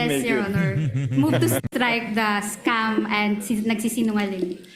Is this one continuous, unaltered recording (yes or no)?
no